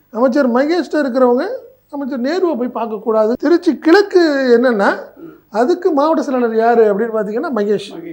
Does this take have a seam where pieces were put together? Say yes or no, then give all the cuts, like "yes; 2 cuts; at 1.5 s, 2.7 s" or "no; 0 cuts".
yes; 1 cut; at 3.4 s